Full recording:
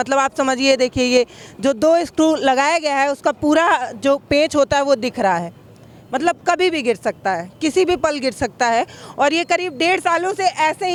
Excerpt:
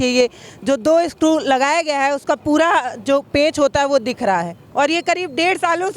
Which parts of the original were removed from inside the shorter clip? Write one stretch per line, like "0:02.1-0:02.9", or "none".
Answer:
0:05.6-0:09.0